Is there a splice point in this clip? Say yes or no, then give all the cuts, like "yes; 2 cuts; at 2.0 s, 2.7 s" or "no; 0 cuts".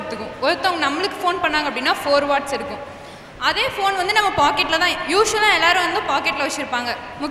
no; 0 cuts